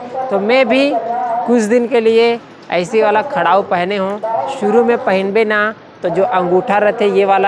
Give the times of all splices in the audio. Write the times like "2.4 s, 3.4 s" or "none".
none